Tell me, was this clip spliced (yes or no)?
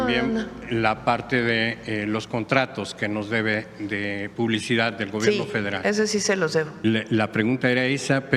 yes